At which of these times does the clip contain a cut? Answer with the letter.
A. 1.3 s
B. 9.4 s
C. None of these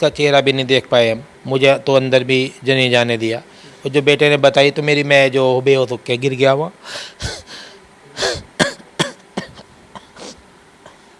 A